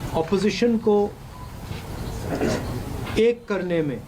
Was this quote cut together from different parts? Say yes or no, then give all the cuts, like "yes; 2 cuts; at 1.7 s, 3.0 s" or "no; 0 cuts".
yes; 1 cut; at 1.0 s